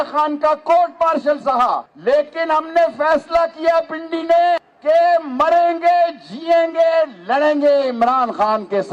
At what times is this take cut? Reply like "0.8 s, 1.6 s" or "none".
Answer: 1.9 s, 4.7 s